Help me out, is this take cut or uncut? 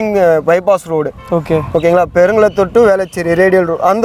uncut